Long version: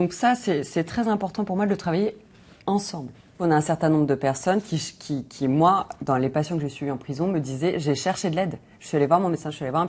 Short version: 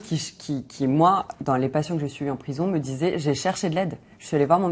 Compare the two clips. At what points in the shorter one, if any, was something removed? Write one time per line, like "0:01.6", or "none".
none